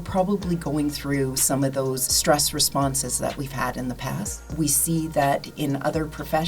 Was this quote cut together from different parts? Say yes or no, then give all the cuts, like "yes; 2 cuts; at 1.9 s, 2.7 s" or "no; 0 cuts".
yes; 2 cuts; at 2.1 s, 4.5 s